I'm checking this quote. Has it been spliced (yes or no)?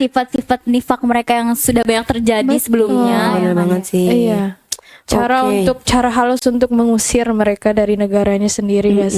no